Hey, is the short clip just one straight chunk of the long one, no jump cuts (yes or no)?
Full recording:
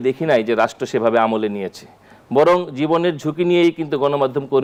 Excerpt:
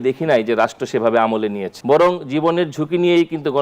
no